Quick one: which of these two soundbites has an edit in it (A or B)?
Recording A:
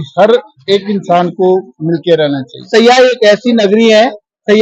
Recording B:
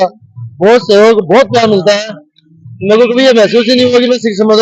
A